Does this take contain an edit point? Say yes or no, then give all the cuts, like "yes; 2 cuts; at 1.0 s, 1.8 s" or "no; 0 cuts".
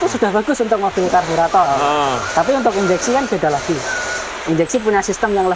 no; 0 cuts